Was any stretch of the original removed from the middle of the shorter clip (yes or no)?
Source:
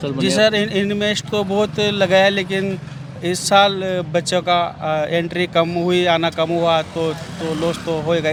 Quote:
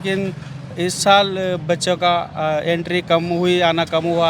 no